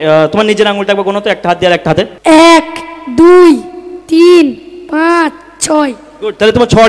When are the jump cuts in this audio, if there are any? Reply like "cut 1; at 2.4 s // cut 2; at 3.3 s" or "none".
cut 1; at 2.1 s